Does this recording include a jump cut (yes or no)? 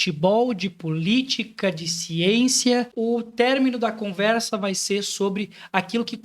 yes